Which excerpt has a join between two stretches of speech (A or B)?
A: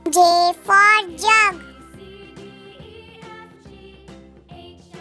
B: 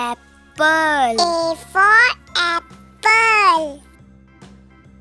A